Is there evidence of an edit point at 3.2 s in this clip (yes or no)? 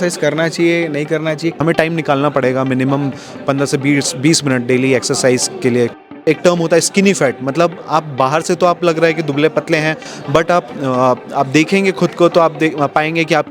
no